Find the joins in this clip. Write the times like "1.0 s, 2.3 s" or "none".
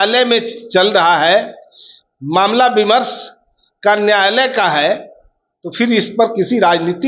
none